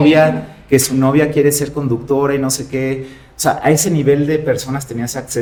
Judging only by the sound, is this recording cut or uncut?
uncut